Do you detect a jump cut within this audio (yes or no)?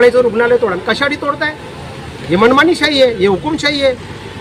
no